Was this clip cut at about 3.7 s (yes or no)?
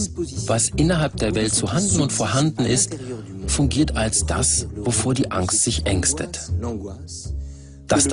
yes